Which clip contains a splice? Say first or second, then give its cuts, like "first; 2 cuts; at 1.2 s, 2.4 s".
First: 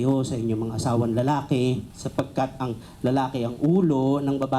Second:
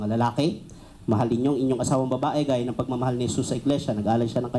first; 1 cut; at 2.0 s